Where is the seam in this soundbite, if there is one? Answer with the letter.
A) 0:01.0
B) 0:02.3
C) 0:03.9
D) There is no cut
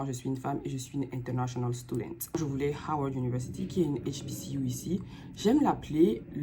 B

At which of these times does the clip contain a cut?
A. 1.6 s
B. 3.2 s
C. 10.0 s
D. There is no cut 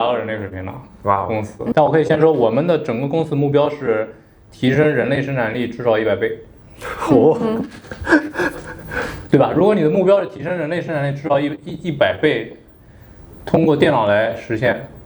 A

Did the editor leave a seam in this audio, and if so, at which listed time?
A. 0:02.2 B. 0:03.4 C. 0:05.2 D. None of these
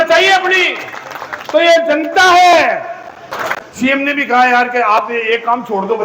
B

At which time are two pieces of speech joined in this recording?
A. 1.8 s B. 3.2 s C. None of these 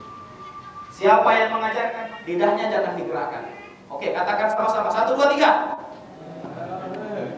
A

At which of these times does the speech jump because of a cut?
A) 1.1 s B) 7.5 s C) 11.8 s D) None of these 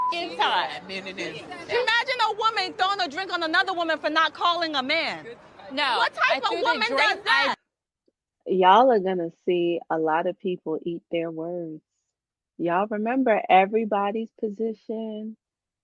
B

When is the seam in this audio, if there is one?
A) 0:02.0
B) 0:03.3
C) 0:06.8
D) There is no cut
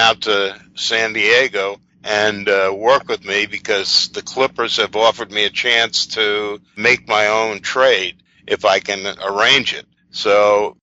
C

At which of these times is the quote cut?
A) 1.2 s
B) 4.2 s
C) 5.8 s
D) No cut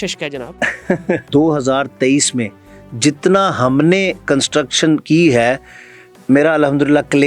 A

